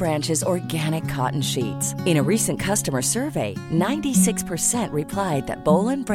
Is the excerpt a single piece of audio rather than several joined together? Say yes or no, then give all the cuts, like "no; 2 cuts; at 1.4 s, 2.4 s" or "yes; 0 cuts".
yes; 0 cuts